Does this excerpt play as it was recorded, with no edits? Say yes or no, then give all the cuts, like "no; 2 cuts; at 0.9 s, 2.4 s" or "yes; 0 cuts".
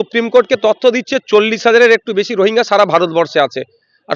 yes; 0 cuts